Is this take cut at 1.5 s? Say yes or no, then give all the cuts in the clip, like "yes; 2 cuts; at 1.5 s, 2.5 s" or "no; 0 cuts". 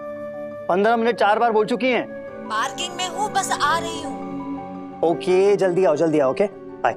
no; 0 cuts